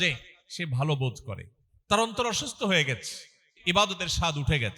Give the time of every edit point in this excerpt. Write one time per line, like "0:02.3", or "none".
0:03.5